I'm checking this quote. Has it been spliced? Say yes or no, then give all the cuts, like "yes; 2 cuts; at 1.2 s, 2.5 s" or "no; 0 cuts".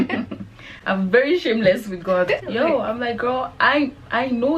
yes; 1 cut; at 2.5 s